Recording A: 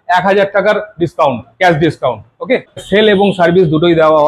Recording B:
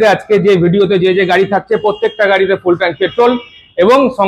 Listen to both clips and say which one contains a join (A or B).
A